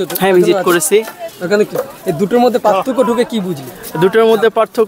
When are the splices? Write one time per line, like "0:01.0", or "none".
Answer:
none